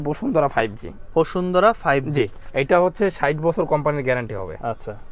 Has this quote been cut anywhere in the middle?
no; 0 cuts

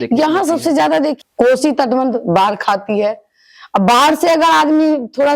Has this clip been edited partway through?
yes; 1 cut; at 1.2 s

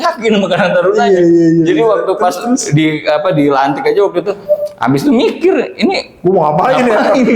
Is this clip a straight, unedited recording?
yes; 0 cuts

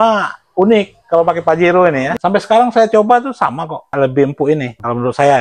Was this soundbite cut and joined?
yes; 1 cut; at 2.1 s

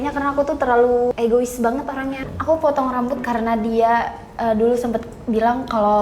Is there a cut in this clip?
yes; 2 cuts; at 1.1 s, 2.2 s

